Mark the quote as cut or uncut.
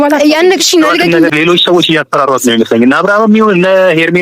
cut